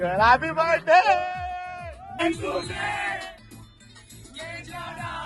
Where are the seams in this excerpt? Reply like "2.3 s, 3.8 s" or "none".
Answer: 2.2 s